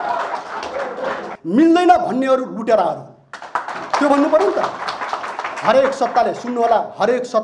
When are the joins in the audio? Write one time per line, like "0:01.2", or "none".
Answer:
0:01.3